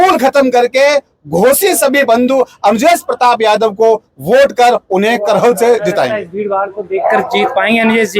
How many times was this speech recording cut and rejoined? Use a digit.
1